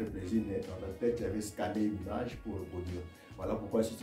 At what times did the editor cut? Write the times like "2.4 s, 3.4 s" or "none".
none